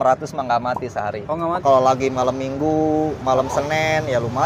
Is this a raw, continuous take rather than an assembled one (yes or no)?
no